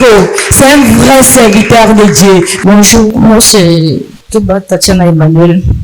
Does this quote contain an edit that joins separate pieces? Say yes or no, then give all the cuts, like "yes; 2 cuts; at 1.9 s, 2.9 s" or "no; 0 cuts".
yes; 1 cut; at 2.5 s